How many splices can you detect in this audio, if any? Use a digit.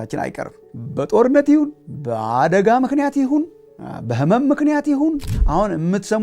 1